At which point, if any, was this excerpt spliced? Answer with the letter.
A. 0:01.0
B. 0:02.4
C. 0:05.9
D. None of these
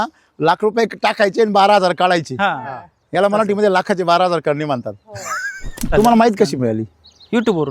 C